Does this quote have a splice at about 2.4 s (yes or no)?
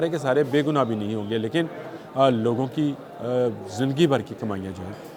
no